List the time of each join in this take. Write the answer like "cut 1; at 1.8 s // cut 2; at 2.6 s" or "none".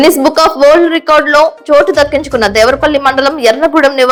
none